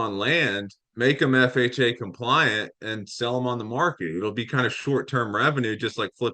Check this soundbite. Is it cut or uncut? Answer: uncut